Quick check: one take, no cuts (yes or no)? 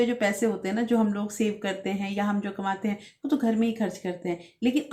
yes